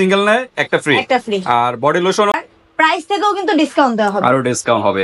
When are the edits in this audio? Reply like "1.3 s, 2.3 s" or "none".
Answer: 2.3 s